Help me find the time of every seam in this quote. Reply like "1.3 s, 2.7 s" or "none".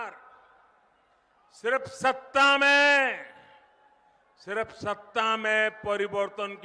none